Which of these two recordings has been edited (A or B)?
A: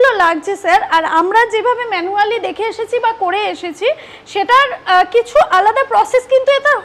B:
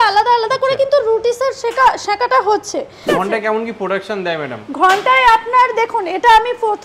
B